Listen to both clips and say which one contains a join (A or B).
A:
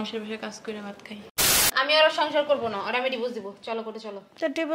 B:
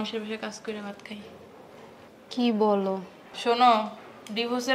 A